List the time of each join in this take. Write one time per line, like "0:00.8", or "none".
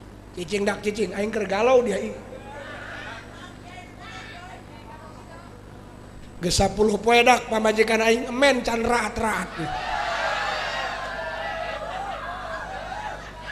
none